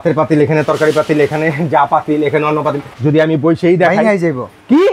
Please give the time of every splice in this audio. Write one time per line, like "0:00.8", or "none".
0:02.9